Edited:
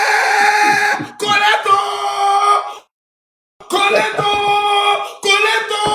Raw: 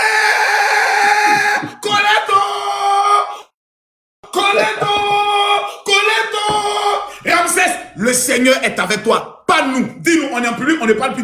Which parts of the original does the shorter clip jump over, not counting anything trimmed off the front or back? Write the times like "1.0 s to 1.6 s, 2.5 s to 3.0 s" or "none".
none